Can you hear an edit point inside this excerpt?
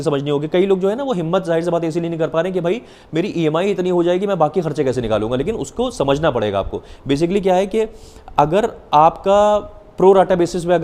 no; 0 cuts

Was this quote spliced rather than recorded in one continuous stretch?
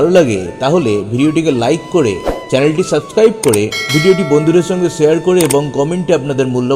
yes; 1 cut; at 3.8 s

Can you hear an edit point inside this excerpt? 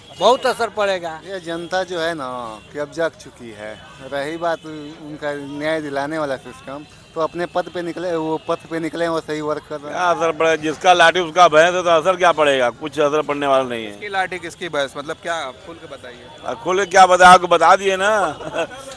yes; 3 cuts; at 1.3 s, 9.8 s, 14.0 s

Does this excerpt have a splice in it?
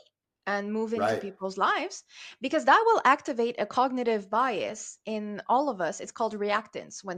no; 0 cuts

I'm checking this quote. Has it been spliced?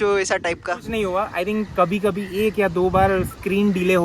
no; 0 cuts

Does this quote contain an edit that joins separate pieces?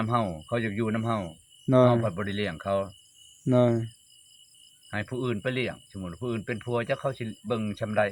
no; 0 cuts

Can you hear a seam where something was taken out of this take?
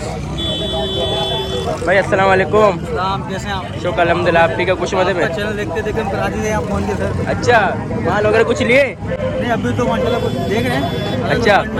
no; 0 cuts

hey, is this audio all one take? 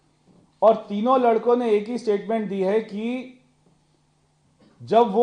yes; 0 cuts

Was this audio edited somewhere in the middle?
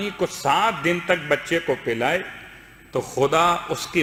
no; 0 cuts

